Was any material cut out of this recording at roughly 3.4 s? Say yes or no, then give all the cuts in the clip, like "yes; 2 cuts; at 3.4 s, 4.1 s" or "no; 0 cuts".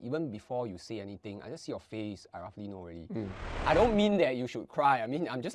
yes; 1 cut; at 3.4 s